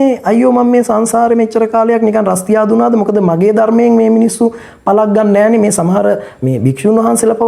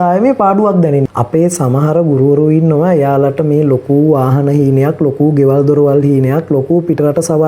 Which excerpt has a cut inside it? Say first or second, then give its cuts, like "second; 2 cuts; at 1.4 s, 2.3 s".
second; 1 cut; at 1.1 s